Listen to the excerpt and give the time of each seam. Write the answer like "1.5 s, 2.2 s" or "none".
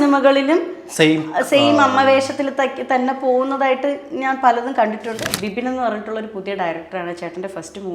5.2 s